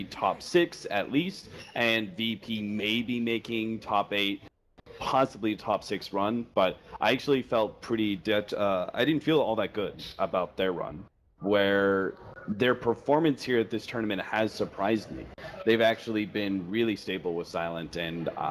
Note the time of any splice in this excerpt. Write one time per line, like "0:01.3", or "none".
0:16.3